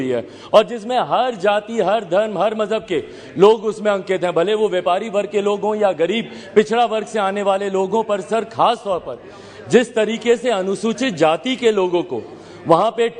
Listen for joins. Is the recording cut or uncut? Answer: uncut